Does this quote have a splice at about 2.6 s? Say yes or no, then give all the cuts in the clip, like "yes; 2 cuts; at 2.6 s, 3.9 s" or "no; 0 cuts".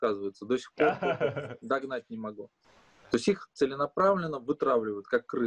yes; 1 cut; at 2.6 s